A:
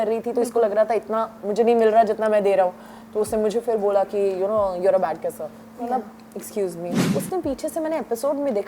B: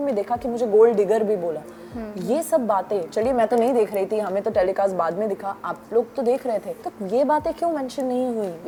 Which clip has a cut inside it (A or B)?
A